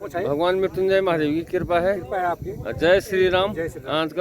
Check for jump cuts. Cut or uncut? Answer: uncut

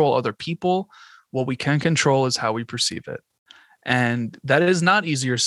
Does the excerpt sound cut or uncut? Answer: uncut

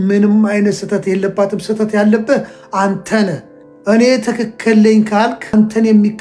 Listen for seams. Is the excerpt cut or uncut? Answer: uncut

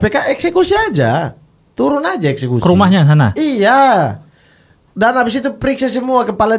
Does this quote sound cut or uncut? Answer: uncut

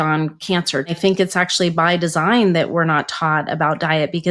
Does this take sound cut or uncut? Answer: cut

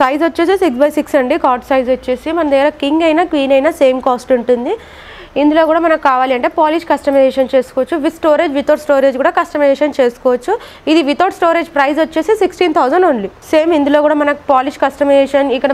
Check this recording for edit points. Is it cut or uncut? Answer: uncut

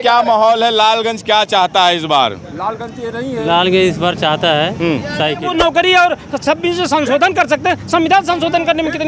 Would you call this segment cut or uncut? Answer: cut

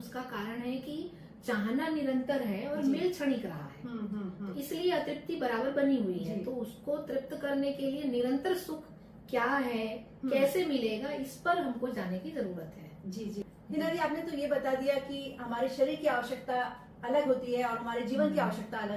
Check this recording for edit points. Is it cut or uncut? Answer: uncut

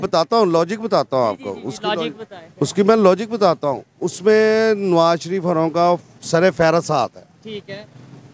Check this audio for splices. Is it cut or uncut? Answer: uncut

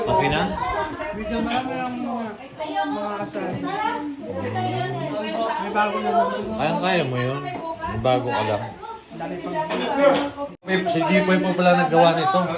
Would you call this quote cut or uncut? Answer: cut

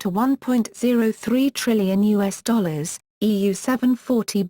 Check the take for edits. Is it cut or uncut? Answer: cut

